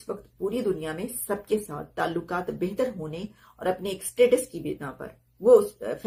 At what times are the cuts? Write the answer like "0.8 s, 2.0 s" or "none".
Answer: none